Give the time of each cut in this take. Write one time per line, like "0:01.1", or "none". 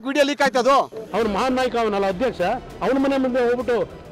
0:00.9